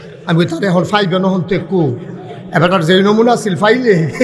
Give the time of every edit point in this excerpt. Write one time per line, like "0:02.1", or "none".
none